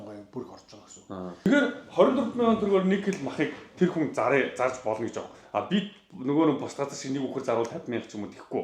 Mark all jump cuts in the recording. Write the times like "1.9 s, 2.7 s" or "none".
1.5 s